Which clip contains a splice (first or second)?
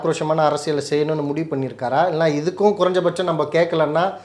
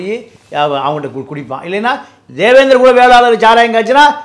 second